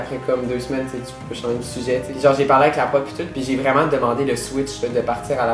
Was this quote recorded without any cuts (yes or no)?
no